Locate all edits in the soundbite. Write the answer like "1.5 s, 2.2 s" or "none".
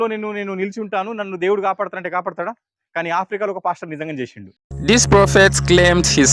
none